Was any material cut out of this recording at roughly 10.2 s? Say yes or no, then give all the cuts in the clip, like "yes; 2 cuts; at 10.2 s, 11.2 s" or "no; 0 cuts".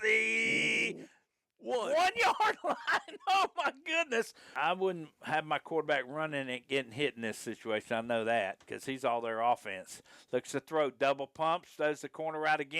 no; 1 cut; at 4.5 s